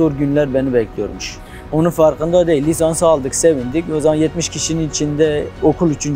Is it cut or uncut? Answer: uncut